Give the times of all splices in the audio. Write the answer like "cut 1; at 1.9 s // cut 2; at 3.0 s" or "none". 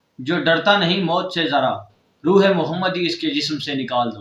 none